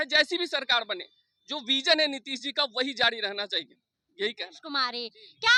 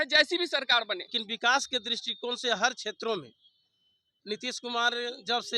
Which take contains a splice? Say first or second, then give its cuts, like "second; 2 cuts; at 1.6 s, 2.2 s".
second; 1 cut; at 1.2 s